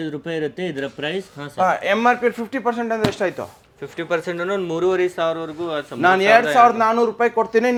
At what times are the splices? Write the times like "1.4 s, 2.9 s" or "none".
none